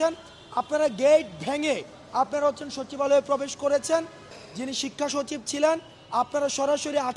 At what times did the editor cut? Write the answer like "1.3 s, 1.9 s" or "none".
4.4 s

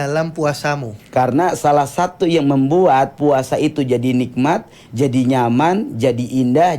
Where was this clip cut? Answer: 0.9 s

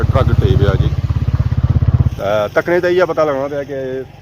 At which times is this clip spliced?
2.1 s

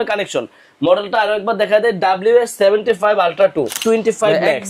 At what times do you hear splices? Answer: 3.8 s

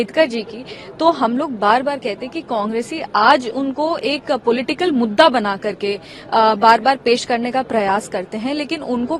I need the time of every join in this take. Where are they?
none

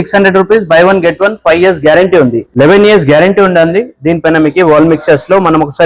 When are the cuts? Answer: 2.4 s

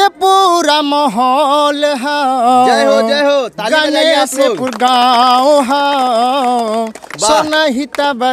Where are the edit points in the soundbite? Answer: none

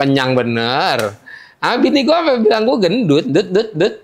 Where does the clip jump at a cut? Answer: none

